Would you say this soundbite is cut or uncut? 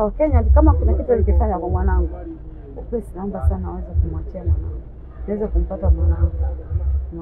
uncut